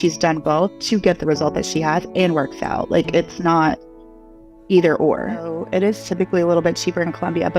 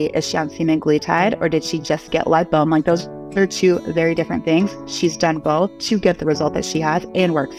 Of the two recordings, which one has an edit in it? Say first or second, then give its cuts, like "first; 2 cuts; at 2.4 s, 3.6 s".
first; 1 cut; at 5.6 s